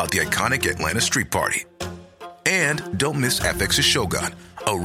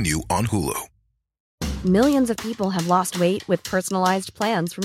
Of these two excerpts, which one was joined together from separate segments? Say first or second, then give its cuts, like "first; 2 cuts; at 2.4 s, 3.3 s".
second; 1 cut; at 1.5 s